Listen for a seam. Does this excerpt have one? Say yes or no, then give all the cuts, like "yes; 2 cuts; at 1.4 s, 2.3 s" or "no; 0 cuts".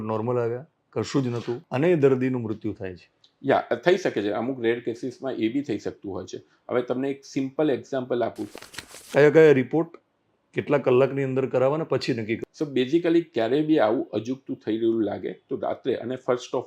yes; 3 cuts; at 1.6 s, 8.5 s, 12.4 s